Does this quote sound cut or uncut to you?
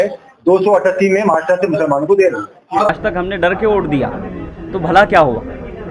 cut